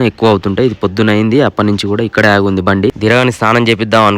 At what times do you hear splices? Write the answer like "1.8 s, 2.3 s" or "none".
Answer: 3.0 s